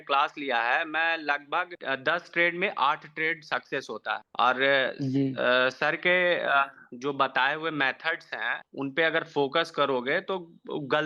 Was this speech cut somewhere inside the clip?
no; 0 cuts

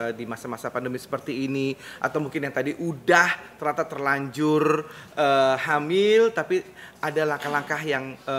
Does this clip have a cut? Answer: no; 0 cuts

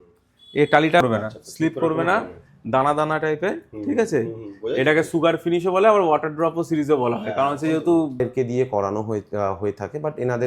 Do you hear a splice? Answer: yes; 2 cuts; at 1.0 s, 8.2 s

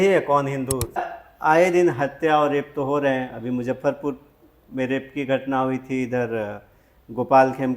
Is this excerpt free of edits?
no; 1 cut; at 1.1 s

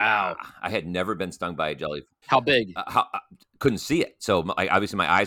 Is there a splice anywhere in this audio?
yes; 1 cut; at 2.1 s

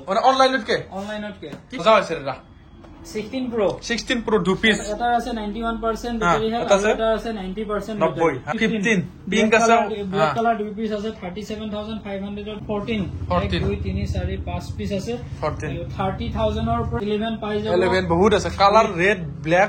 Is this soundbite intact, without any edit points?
no; 4 cuts; at 1.8 s, 8.5 s, 12.6 s, 17.0 s

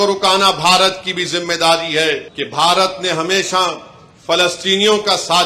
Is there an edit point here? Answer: yes; 1 cut; at 2.3 s

